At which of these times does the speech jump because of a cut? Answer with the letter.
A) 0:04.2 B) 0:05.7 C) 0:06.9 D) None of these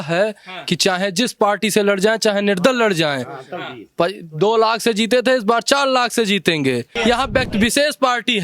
C